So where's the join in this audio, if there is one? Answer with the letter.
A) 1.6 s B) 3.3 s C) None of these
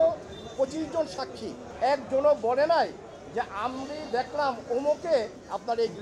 A